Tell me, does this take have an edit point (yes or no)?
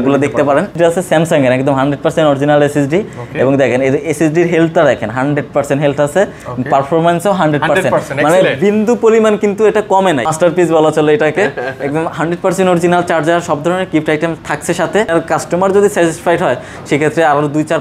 yes